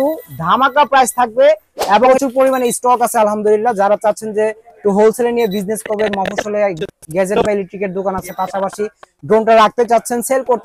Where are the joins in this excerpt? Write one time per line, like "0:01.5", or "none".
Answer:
0:02.1

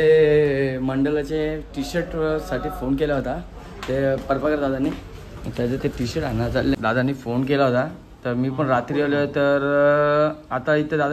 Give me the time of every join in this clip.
0:06.7

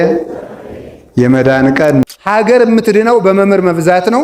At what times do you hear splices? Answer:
0:02.0

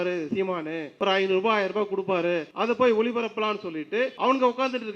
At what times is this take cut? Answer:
0:00.9
0:02.5
0:04.1

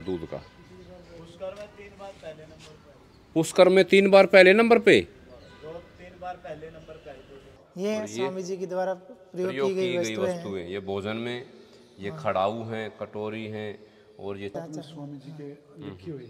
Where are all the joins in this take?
0:07.6
0:14.5

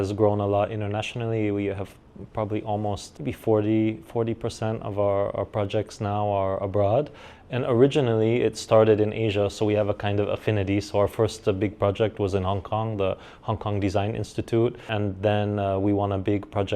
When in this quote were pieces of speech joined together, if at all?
0:03.1
0:14.9

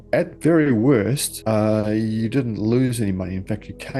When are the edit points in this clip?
none

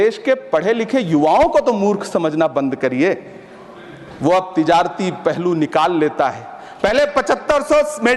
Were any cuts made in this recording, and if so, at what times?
none

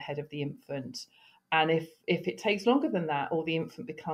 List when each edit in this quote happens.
none

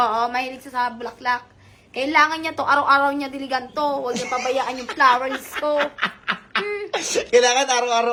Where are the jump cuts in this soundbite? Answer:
none

